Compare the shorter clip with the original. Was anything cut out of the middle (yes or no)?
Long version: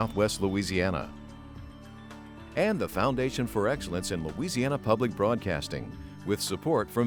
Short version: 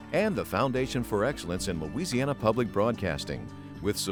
no